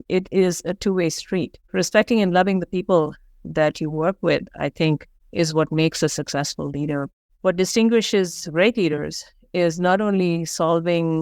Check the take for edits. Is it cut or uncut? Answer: cut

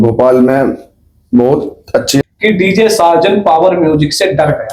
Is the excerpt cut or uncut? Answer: cut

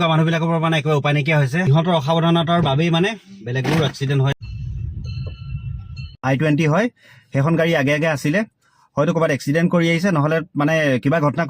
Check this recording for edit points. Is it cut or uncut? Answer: cut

